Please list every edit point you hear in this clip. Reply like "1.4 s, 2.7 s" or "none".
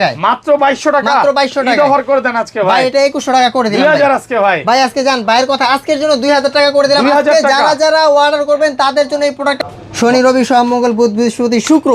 9.6 s